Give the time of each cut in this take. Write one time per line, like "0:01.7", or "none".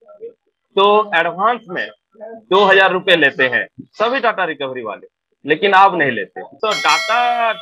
0:06.6

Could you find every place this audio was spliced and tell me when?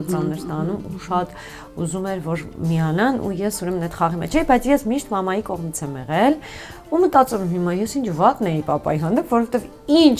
none

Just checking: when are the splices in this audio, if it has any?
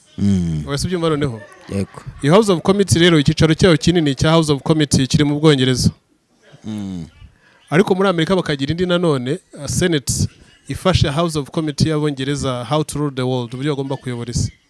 none

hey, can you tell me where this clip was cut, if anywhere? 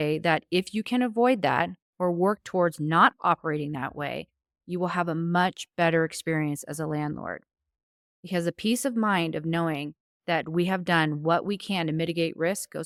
none

